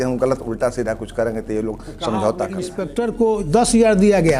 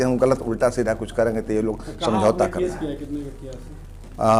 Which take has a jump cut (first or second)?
first